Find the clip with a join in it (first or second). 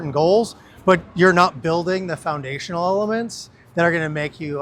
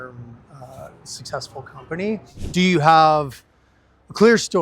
second